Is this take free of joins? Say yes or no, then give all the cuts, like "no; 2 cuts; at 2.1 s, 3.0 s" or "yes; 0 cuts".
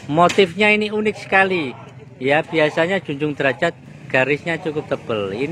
no; 1 cut; at 3.9 s